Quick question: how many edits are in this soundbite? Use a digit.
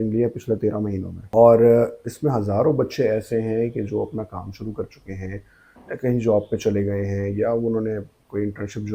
1